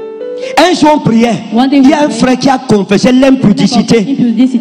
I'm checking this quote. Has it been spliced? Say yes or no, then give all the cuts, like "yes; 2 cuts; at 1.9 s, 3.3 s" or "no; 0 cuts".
no; 0 cuts